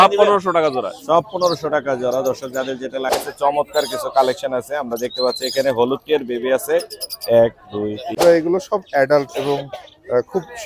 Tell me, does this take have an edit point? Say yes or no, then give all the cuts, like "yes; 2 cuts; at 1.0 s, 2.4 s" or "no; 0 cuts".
yes; 2 cuts; at 3.2 s, 8.2 s